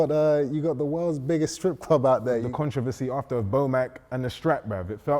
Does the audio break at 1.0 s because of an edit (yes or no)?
no